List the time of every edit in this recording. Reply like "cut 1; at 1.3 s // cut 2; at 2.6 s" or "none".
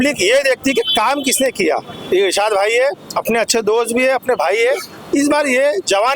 cut 1; at 1.9 s